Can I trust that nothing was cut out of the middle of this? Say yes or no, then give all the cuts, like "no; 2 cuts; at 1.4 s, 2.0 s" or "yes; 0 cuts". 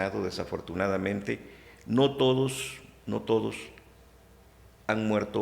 yes; 0 cuts